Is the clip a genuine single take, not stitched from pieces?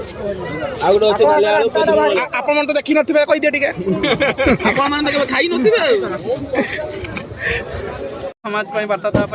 no; 1 cut; at 8.4 s

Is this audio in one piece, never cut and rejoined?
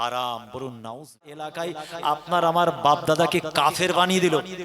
no; 1 cut; at 1.5 s

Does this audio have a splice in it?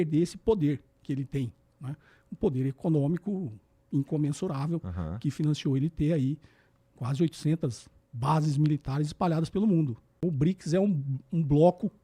yes; 1 cut; at 10.1 s

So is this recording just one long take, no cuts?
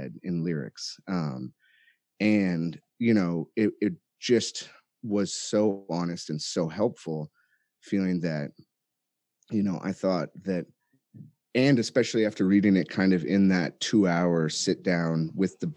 yes; 0 cuts

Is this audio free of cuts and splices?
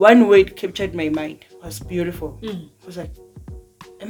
yes; 0 cuts

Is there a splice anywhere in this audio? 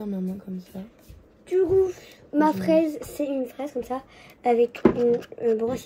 no; 0 cuts

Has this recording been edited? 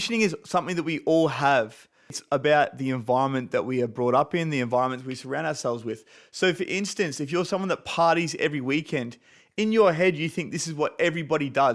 yes; 1 cut; at 2.1 s

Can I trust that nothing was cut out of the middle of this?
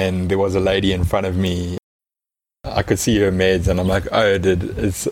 yes; 0 cuts

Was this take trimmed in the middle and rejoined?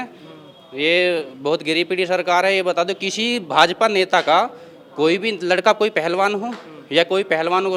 no; 0 cuts

